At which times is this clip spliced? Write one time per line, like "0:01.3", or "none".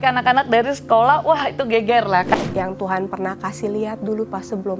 0:02.3